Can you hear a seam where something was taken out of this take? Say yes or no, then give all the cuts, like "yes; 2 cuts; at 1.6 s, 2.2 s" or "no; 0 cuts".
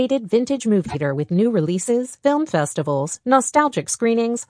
yes; 1 cut; at 0.9 s